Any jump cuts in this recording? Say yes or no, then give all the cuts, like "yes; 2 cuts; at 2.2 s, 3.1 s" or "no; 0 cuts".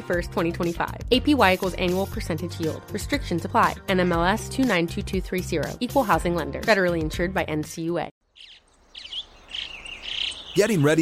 yes; 1 cut; at 8.1 s